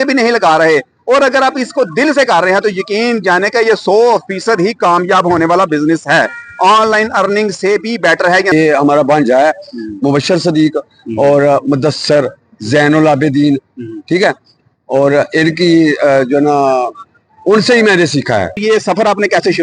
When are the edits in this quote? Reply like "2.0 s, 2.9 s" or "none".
8.5 s, 18.6 s